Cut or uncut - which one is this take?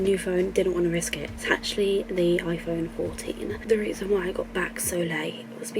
uncut